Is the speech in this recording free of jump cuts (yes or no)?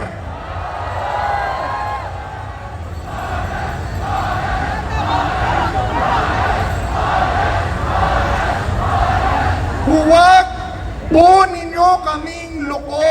no